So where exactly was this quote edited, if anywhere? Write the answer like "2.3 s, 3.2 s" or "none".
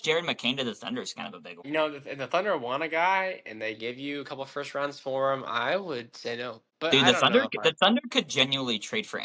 1.6 s, 6.9 s